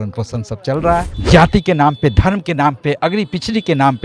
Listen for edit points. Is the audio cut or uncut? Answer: cut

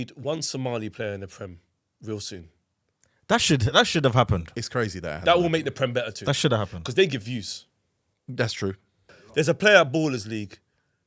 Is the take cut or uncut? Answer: cut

